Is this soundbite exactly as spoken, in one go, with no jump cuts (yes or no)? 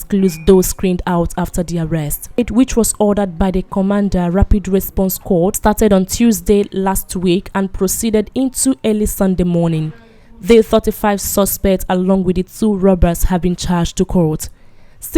no